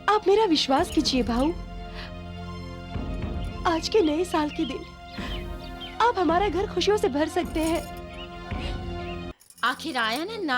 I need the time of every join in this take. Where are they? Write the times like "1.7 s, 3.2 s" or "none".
9.3 s